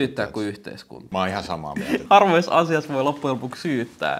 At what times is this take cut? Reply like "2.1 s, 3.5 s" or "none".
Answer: 1.0 s, 2.0 s